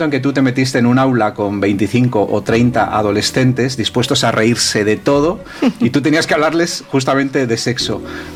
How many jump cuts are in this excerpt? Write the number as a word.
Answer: zero